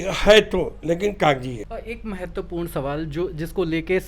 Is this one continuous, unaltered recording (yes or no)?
no